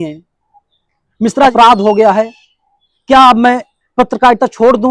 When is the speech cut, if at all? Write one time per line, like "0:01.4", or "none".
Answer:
0:01.5